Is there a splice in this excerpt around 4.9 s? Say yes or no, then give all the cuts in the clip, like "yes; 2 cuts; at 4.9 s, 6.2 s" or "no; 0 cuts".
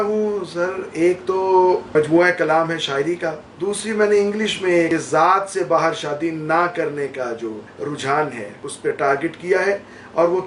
yes; 5 cuts; at 1.9 s, 3.5 s, 4.9 s, 7.7 s, 8.7 s